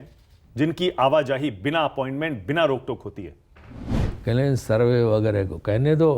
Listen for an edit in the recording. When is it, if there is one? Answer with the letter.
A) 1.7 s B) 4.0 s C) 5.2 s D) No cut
B